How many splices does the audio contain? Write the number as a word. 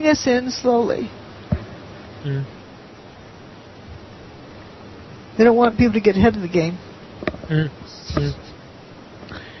one